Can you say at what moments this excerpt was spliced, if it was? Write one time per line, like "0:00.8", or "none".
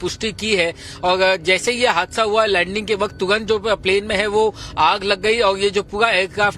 0:03.2